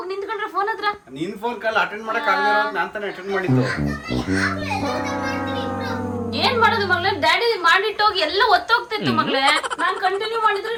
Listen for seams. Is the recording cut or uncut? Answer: uncut